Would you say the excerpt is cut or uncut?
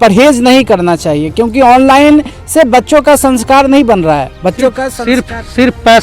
uncut